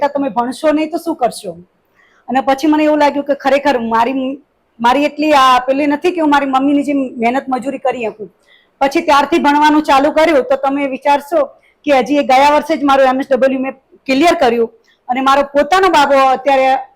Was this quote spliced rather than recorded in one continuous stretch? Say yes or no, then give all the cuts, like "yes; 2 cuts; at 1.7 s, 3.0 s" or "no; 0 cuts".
no; 0 cuts